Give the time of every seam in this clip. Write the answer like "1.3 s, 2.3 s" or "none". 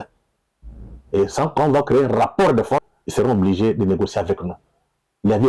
3.0 s